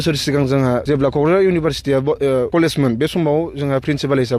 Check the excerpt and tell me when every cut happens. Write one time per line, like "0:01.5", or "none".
0:00.8
0:02.5